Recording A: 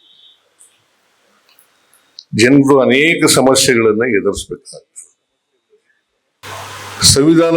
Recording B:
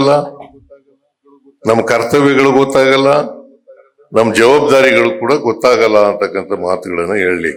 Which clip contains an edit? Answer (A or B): A